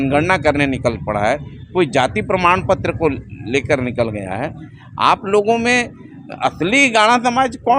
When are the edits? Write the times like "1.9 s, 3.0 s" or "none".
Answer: none